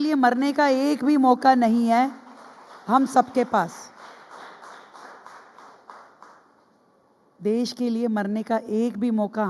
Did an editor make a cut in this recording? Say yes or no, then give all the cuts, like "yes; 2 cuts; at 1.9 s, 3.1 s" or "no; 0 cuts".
no; 0 cuts